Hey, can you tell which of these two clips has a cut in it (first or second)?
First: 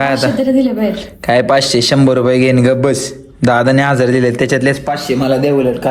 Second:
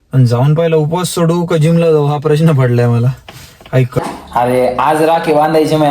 second